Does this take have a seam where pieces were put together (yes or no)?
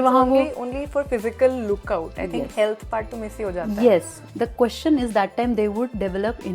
yes